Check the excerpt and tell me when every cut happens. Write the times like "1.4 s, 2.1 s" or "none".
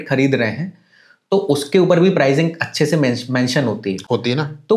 none